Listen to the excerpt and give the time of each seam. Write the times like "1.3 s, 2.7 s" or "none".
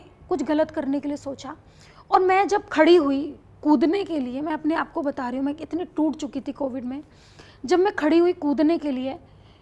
none